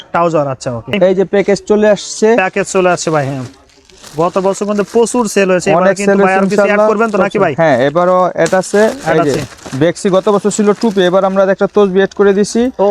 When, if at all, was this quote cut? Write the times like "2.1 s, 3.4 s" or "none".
0.9 s